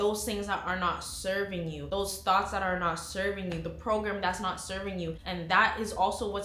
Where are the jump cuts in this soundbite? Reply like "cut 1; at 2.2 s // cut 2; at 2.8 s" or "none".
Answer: cut 1; at 5.2 s